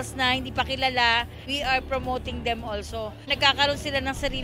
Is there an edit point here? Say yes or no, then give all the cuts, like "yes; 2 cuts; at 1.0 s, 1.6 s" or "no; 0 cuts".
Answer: yes; 2 cuts; at 1.4 s, 3.3 s